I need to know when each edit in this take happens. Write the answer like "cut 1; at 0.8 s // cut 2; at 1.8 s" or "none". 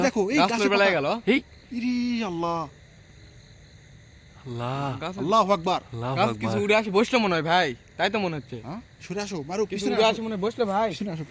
none